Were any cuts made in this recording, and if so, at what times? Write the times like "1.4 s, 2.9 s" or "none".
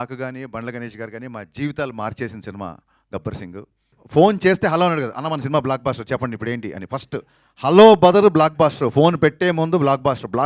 3.9 s